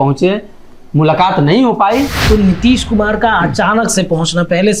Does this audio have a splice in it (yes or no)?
yes